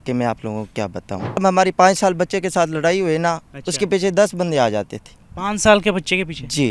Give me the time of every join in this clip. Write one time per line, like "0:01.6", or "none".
0:01.4